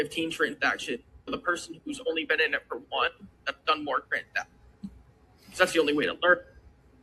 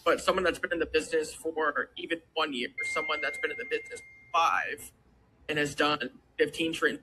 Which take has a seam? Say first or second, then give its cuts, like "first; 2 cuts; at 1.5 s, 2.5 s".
second; 2 cuts; at 2.8 s, 5.5 s